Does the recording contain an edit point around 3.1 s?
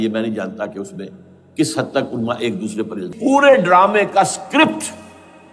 yes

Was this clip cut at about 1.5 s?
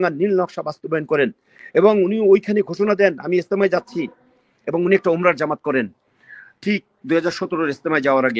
no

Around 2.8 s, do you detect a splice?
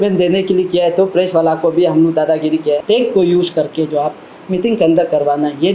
yes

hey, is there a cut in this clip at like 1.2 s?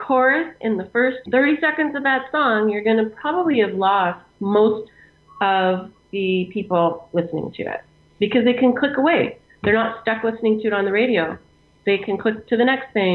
yes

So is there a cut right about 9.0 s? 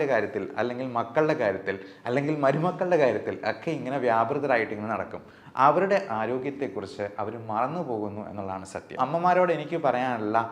yes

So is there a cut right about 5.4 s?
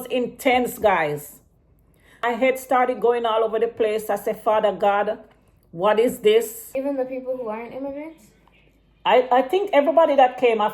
no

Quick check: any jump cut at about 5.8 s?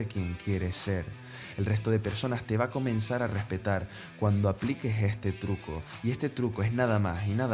yes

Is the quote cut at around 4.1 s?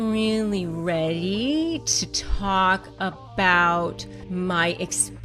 yes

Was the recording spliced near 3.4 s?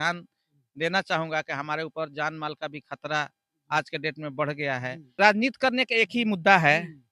no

